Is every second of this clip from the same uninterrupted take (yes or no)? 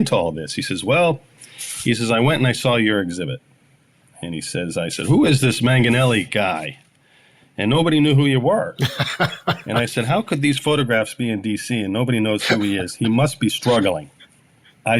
yes